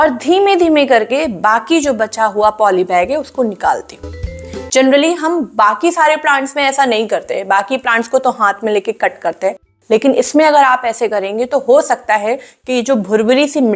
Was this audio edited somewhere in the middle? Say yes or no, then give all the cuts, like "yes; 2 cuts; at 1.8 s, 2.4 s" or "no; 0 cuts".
no; 0 cuts